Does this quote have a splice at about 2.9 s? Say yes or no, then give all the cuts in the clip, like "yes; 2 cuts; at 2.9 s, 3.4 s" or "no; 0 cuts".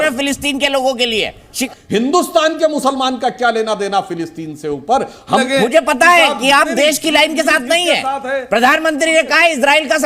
no; 2 cuts; at 1.6 s, 5.4 s